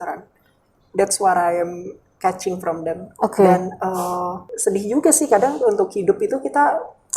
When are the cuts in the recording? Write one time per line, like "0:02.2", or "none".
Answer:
0:04.4

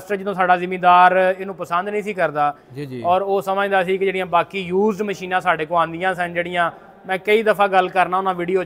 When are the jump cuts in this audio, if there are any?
none

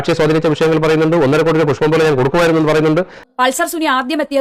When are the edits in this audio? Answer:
0:03.2

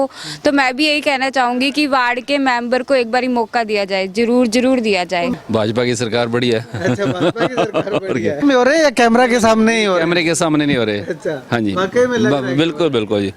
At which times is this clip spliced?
0:05.3
0:08.4

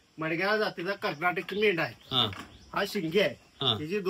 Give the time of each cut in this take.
none

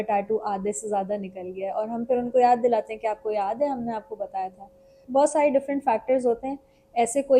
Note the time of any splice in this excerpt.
0:04.9

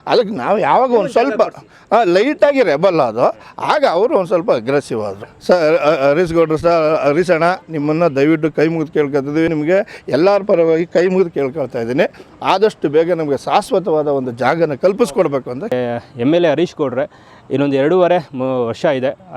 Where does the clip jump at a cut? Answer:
0:05.2
0:09.5
0:15.6

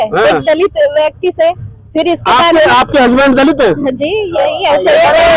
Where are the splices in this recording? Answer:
none

